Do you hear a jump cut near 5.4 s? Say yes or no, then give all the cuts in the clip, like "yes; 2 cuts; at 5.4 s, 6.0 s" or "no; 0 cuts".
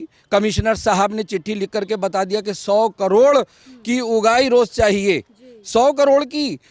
no; 0 cuts